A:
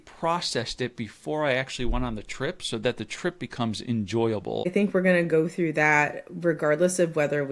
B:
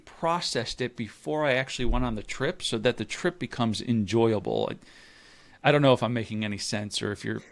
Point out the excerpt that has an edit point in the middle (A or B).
A